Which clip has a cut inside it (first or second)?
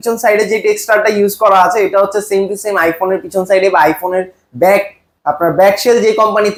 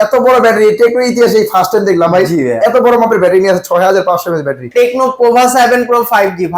second